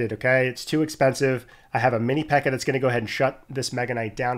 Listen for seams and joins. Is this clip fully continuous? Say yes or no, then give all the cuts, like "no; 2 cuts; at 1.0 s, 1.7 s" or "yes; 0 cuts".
yes; 0 cuts